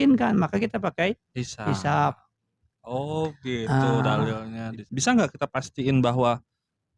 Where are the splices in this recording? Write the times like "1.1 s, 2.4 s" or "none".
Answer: 4.8 s